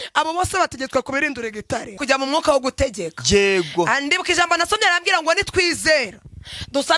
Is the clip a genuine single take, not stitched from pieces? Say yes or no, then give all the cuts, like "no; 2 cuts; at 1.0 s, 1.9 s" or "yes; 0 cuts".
no; 1 cut; at 2.0 s